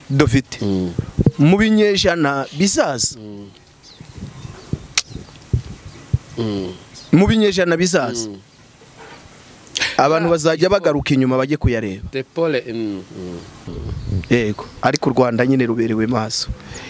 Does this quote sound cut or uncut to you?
cut